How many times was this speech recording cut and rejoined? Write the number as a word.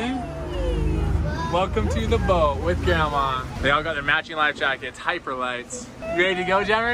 two